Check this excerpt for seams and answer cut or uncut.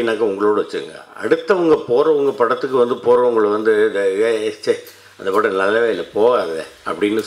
uncut